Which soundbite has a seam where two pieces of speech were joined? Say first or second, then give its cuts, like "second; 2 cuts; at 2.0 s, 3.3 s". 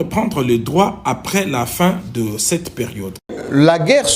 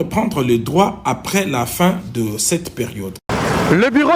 first; 1 cut; at 3.2 s